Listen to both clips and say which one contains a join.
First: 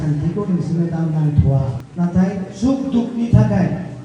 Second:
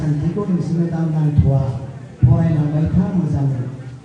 first; 1 cut; at 1.8 s

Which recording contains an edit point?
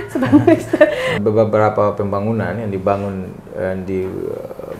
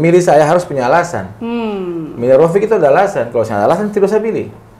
first; 1 cut; at 1.2 s

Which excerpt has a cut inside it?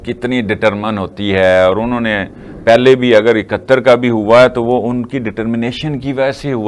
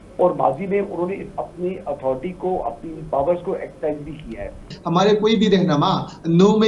second; 1 cut; at 4.7 s

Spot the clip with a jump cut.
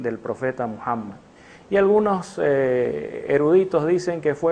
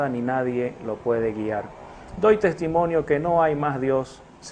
first; 1 cut; at 3.2 s

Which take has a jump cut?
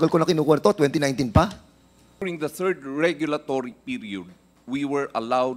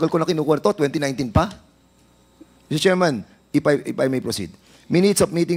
first; 1 cut; at 2.3 s

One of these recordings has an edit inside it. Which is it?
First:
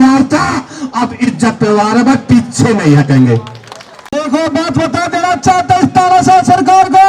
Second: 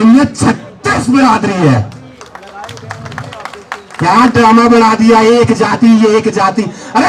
first; 1 cut; at 4.1 s

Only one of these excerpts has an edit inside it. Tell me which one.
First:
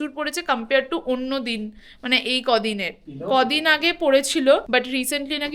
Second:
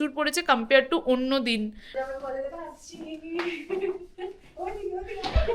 second; 1 cut; at 1.8 s

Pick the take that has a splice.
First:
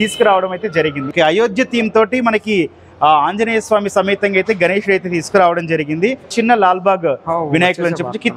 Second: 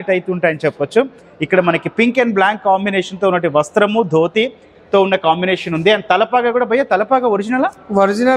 first; 2 cuts; at 1.1 s, 6.3 s

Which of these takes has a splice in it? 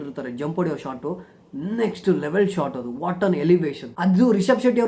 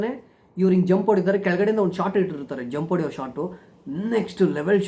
first; 1 cut; at 4.0 s

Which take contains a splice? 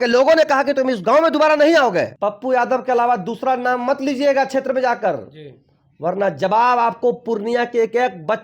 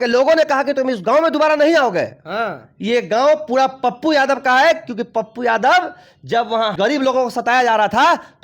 first; 1 cut; at 2.1 s

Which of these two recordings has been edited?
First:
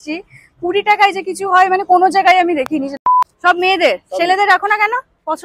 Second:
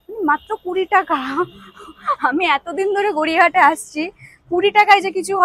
first; 1 cut; at 2.9 s

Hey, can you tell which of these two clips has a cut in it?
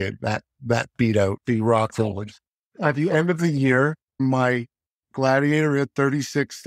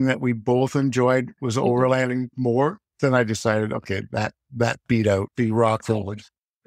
first; 1 cut; at 4.0 s

